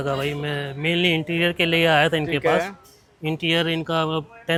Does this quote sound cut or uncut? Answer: uncut